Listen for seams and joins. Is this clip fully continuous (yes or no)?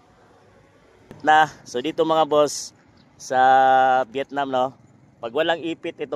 no